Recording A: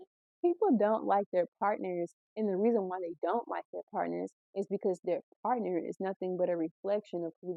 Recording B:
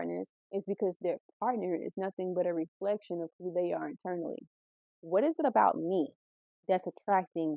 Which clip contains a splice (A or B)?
B